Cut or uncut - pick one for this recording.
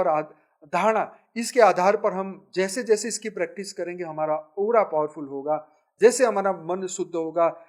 uncut